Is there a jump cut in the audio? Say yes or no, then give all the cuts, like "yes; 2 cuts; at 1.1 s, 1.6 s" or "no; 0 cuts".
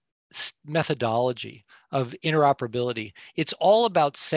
no; 0 cuts